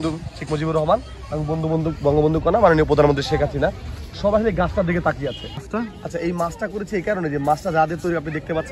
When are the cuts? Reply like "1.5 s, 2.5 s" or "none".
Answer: 5.6 s